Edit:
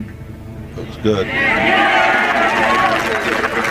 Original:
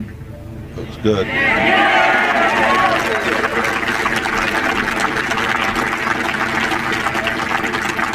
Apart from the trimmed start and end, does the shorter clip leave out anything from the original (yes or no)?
no